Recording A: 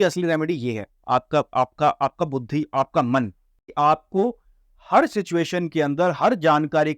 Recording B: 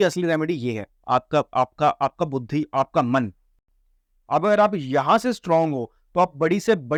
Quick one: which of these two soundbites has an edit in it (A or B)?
A